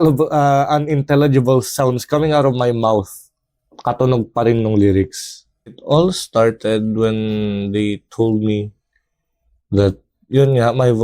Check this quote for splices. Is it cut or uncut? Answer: cut